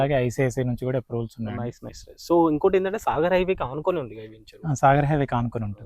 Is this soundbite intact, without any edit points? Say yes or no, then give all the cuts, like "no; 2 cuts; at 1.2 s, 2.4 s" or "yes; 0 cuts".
no; 1 cut; at 1.9 s